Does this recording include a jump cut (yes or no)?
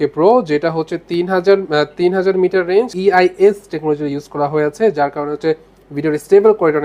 yes